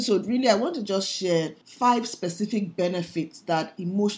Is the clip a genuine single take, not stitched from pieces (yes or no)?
no